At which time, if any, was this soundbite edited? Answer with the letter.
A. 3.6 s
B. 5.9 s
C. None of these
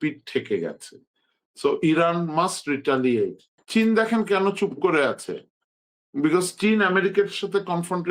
A